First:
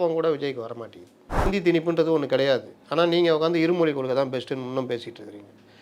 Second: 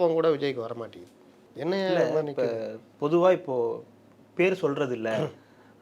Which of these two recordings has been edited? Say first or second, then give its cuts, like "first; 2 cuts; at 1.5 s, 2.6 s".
first; 1 cut; at 1.5 s